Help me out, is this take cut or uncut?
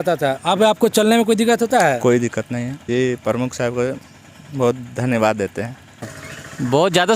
cut